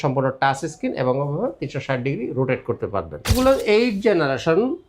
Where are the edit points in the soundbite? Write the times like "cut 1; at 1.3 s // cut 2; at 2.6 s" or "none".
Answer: cut 1; at 3.3 s